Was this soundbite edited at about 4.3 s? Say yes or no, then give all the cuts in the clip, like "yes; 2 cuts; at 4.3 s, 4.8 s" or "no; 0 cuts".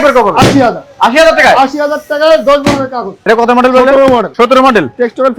yes; 2 cuts; at 3.1 s, 4.3 s